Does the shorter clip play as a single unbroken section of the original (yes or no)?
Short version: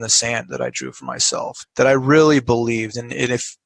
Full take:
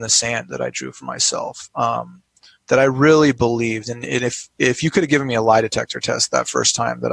no